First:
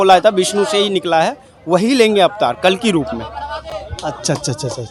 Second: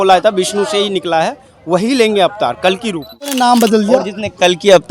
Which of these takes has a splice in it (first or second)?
second